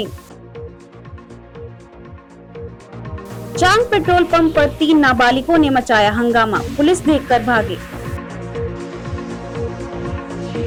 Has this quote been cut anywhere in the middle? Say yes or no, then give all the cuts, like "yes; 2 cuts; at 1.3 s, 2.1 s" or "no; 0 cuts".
no; 0 cuts